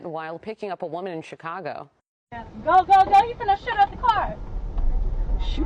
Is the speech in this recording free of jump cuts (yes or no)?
yes